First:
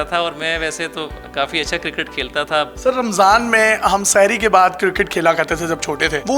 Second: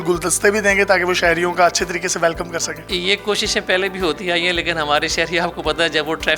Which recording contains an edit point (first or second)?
first